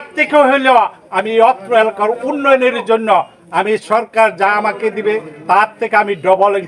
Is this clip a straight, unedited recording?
yes; 0 cuts

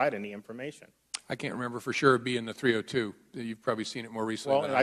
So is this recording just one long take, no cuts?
yes; 0 cuts

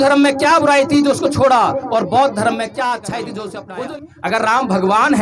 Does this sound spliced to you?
yes; 1 cut; at 3.7 s

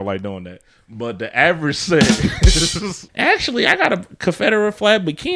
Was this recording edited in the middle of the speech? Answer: yes; 1 cut; at 3.0 s

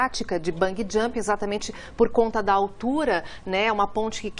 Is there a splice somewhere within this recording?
yes; 1 cut; at 1.7 s

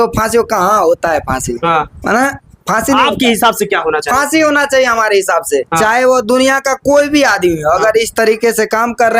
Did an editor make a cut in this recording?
no; 0 cuts

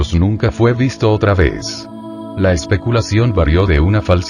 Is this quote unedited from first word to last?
no; 1 cut; at 2.3 s

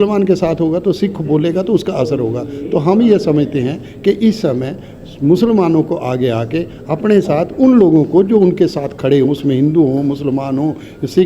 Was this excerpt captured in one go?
yes; 0 cuts

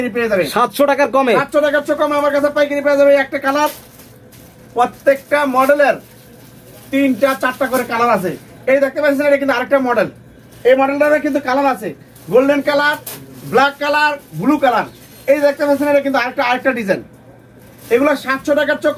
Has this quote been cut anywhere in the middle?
no; 0 cuts

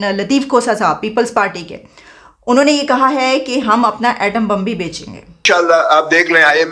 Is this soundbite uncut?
no; 1 cut; at 5.3 s

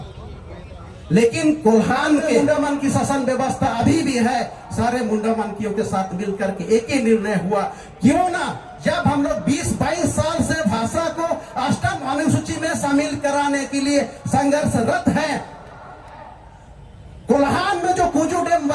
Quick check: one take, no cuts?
no; 1 cut; at 2.4 s

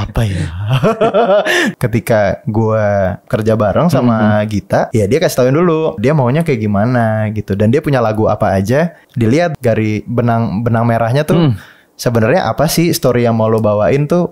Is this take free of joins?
no; 5 cuts; at 1.7 s, 3.2 s, 4.9 s, 6.0 s, 9.4 s

